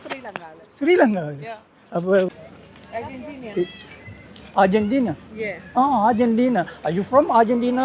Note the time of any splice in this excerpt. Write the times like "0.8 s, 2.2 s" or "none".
2.3 s